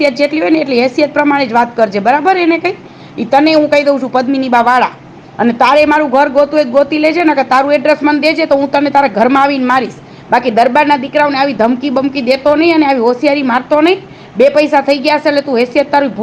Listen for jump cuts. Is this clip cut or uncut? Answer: uncut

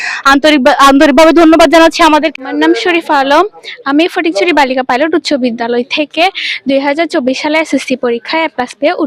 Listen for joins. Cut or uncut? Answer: cut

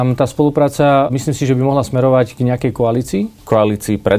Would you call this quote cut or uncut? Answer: cut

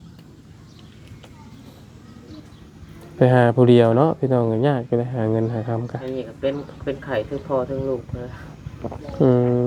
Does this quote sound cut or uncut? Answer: uncut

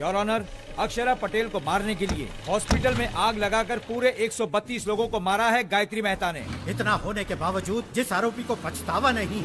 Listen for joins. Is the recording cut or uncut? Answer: cut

